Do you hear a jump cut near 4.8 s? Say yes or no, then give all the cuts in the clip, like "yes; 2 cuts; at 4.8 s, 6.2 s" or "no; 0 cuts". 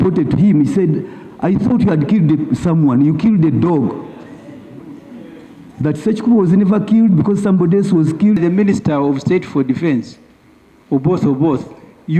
no; 1 cut; at 8.4 s